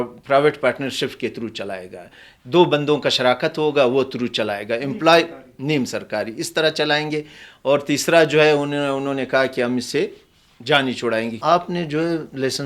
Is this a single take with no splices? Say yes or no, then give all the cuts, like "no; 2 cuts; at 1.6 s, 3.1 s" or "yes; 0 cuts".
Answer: no; 1 cut; at 11.4 s